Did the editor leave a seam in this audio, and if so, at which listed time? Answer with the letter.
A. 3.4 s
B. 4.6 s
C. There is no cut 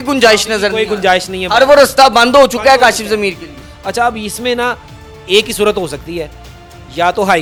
C